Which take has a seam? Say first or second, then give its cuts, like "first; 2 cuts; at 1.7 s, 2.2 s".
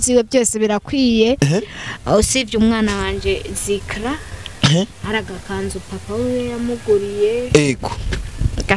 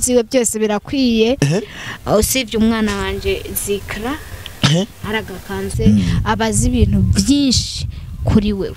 second; 1 cut; at 5.7 s